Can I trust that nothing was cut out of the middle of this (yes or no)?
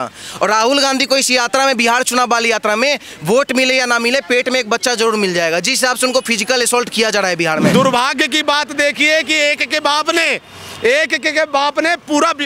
no